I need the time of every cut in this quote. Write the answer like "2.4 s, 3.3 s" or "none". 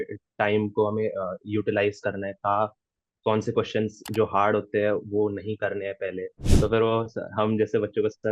6.4 s